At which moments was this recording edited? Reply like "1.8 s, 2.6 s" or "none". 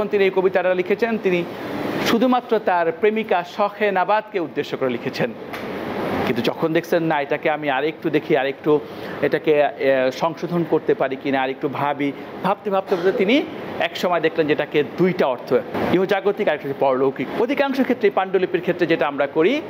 15.7 s, 17.3 s